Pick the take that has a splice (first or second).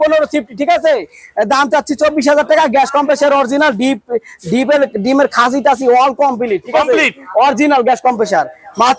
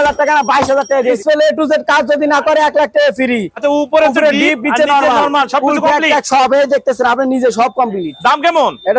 second